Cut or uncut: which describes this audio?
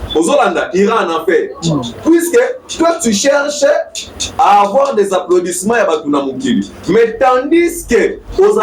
uncut